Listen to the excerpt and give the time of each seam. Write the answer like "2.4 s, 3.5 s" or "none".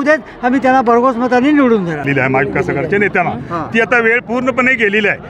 2.0 s